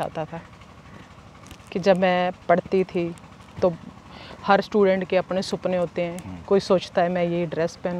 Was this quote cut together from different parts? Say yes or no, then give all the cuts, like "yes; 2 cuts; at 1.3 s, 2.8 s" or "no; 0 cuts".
no; 0 cuts